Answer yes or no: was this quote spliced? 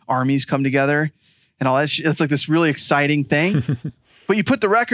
no